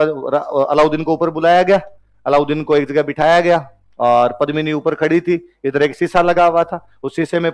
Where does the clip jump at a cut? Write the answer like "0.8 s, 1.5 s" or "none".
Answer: none